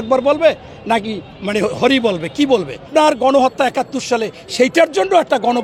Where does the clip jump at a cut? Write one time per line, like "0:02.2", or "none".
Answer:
0:02.9